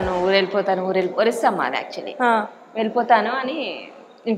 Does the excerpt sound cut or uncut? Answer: uncut